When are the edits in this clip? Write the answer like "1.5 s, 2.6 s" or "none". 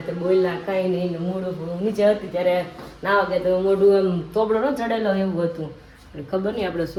none